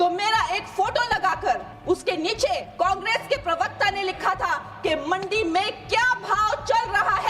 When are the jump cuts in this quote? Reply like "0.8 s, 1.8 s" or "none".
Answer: 1.7 s, 2.7 s